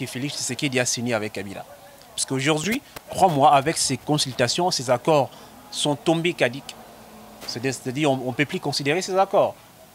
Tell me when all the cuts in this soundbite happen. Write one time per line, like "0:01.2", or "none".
none